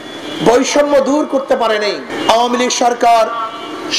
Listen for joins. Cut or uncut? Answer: cut